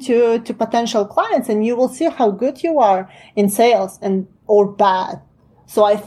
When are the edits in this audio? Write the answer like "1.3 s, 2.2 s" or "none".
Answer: none